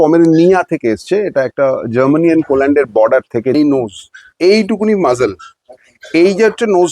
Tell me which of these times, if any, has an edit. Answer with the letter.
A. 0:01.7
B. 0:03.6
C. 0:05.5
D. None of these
B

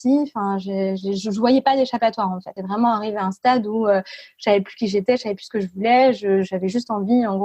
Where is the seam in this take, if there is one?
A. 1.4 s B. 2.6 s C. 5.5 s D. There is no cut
B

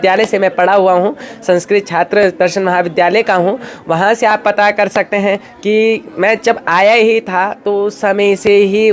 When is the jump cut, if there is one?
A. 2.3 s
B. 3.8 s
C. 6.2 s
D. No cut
D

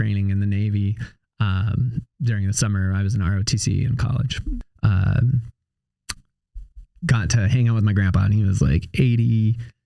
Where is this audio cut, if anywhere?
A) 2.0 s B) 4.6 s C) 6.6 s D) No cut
B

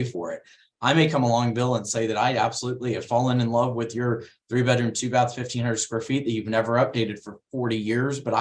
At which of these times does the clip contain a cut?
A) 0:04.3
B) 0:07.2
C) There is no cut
C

